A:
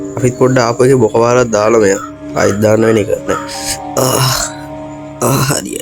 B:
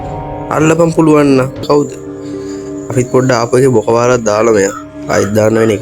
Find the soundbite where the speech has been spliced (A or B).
B